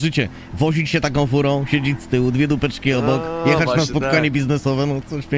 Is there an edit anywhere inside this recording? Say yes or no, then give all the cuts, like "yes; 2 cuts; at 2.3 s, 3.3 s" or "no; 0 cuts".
no; 0 cuts